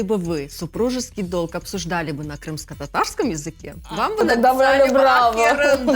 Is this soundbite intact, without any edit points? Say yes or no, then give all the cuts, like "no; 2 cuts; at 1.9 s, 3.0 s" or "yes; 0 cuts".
yes; 0 cuts